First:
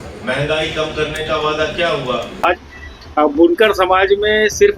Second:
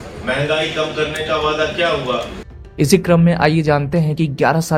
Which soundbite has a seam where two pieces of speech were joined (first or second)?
first